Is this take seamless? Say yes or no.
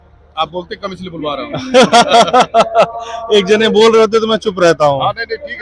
yes